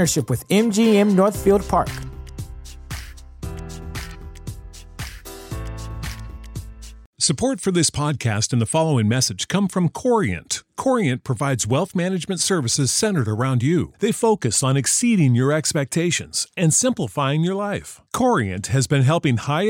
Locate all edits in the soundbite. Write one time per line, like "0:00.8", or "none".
0:07.0